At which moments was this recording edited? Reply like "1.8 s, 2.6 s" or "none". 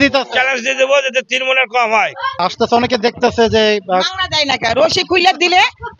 2.4 s